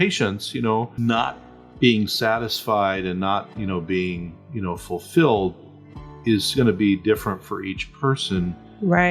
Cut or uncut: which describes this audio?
cut